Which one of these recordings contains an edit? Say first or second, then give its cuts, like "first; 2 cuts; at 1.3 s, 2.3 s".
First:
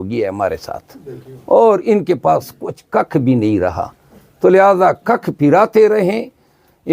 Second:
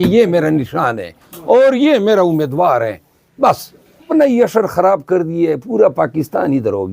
second; 1 cut; at 4.1 s